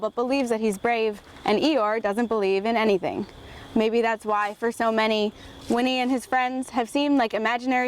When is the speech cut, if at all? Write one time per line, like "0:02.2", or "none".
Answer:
none

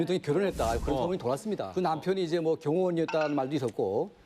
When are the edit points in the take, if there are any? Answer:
0:01.7

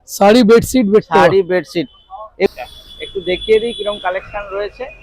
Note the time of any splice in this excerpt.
0:02.5

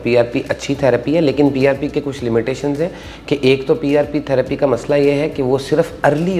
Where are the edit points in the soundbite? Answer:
none

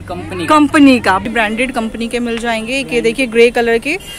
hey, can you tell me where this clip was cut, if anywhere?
0:01.2

